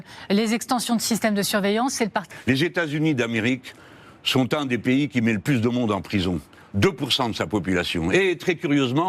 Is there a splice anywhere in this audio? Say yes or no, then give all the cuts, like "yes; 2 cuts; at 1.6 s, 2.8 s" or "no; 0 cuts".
yes; 1 cut; at 2.2 s